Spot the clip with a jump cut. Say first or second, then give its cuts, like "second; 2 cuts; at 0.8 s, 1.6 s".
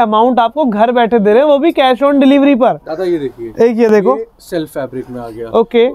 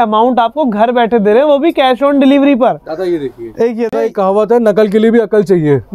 second; 1 cut; at 3.9 s